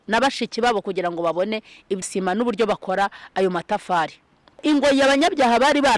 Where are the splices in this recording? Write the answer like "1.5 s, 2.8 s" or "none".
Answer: 2.1 s, 4.6 s